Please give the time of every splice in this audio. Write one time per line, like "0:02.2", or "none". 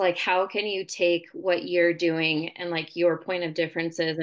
none